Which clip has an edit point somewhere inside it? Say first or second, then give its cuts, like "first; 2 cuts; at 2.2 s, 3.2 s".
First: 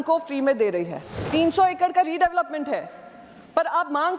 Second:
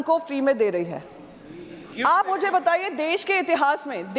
first; 1 cut; at 1.1 s